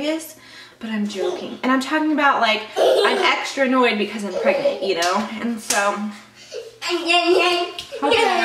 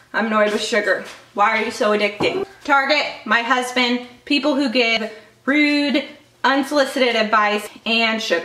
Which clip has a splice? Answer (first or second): second